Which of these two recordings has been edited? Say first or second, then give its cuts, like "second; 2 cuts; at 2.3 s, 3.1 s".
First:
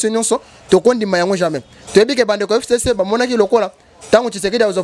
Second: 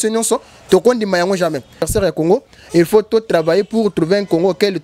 second; 1 cut; at 1.9 s